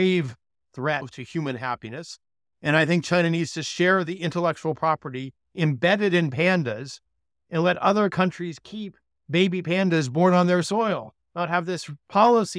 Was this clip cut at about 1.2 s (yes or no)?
yes